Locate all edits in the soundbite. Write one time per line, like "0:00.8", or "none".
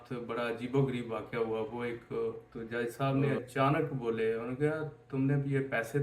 0:02.5